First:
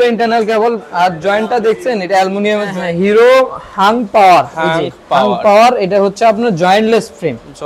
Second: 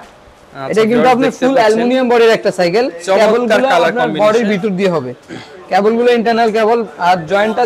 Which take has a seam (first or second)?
first